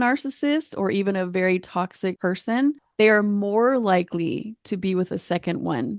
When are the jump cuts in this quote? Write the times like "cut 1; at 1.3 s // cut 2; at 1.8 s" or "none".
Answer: cut 1; at 2.3 s